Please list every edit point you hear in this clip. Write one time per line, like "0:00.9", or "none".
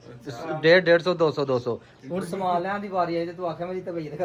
none